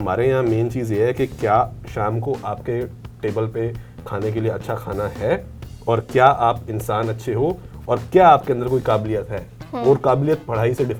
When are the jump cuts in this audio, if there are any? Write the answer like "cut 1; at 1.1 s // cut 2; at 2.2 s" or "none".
none